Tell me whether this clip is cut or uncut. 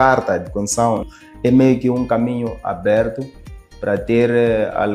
cut